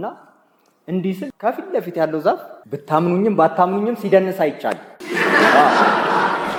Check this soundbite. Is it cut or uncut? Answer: uncut